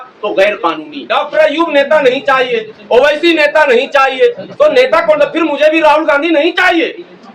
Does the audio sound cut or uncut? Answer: cut